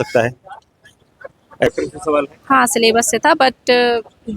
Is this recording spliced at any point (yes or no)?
yes